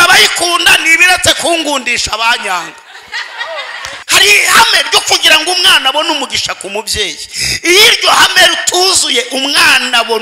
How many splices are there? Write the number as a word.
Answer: one